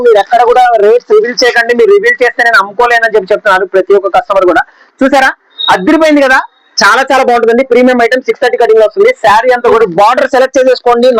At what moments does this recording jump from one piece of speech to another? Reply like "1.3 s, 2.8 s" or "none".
4.8 s, 9.8 s